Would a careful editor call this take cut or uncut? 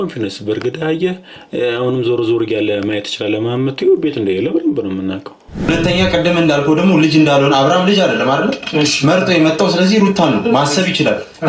cut